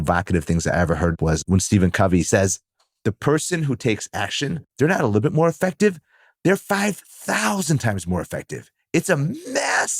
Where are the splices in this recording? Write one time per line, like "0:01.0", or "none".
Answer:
0:01.2
0:02.3
0:04.6